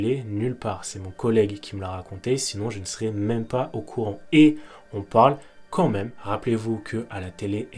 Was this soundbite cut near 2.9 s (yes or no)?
no